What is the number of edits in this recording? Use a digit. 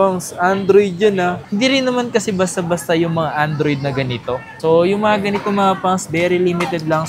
1